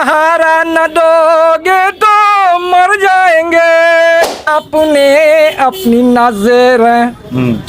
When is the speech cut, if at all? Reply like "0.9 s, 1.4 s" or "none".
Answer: 4.4 s